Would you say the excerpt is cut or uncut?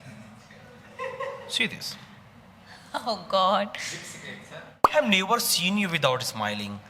cut